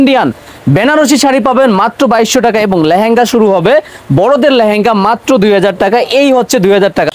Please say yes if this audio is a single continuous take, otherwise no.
yes